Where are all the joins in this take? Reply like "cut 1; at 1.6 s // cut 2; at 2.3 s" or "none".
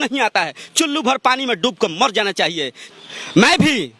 cut 1; at 2.8 s